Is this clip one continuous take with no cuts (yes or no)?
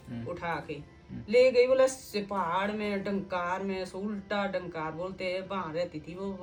yes